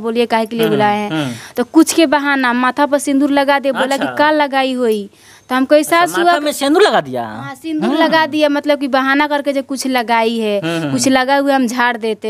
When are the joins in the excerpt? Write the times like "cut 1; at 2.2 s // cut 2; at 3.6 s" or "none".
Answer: none